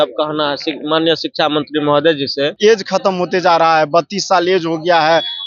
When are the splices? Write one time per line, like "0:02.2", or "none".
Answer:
0:02.5

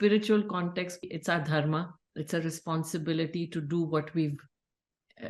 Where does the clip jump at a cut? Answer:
0:01.0

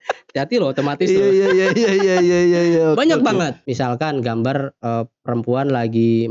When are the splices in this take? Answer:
0:03.6

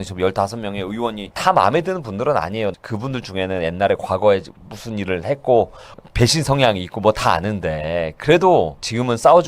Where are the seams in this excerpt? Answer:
0:01.2
0:02.7
0:06.0

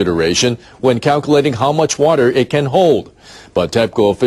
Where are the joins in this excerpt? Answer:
0:01.1

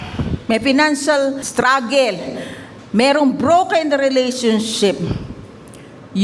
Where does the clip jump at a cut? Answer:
0:01.4

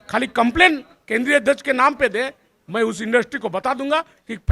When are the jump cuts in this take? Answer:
none

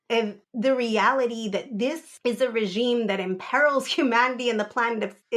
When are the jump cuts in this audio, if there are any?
0:02.1

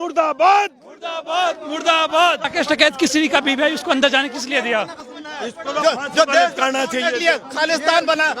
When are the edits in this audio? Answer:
0:02.5
0:05.0

